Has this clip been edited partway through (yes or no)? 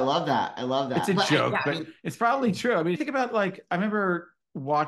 yes